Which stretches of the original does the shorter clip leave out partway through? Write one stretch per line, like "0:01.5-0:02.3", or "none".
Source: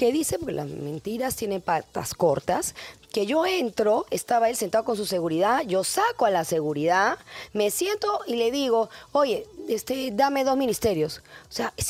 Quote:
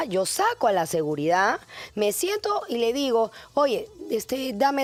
none